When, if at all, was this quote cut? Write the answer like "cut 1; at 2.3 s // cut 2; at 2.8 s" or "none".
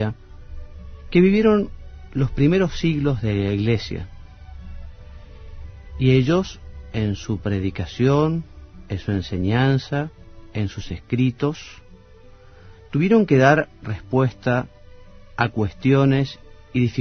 cut 1; at 11.0 s